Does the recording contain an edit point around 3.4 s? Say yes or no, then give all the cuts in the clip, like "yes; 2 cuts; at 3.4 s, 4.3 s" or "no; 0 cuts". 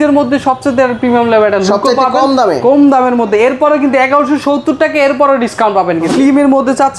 no; 1 cut; at 6.1 s